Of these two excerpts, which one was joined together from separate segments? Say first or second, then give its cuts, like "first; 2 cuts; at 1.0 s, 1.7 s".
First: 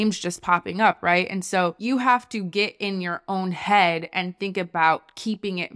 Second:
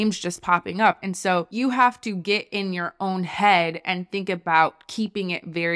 second; 1 cut; at 1.0 s